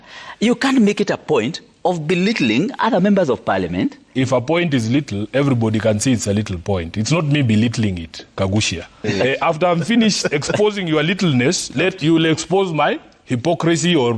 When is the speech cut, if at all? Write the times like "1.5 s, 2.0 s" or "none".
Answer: 4.0 s, 9.1 s